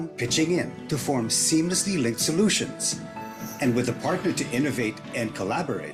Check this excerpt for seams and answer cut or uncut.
uncut